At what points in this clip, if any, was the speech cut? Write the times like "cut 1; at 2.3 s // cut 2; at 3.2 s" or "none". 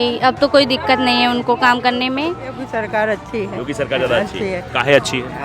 cut 1; at 2.6 s